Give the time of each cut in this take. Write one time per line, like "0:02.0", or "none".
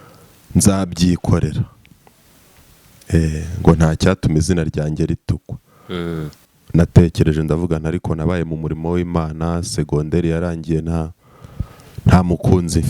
0:06.4